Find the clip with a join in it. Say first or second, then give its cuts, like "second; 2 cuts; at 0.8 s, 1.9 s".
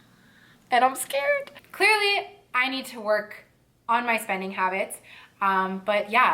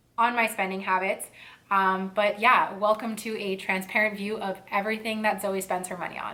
first; 1 cut; at 1.6 s